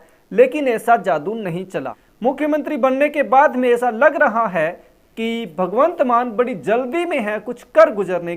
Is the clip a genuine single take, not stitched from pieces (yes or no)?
no